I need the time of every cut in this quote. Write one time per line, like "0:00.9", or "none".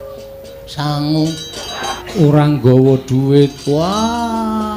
0:02.0